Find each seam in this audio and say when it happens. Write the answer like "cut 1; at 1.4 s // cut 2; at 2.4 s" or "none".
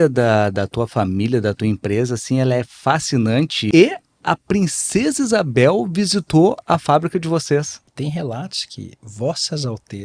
cut 1; at 3.6 s // cut 2; at 7.9 s